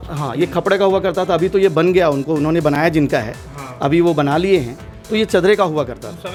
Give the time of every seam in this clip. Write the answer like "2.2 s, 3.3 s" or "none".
none